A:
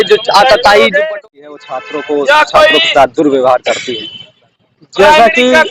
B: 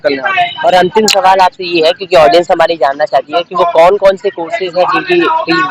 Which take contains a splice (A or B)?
A